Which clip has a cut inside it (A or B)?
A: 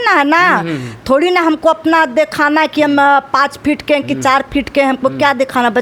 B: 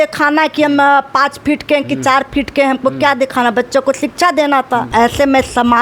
B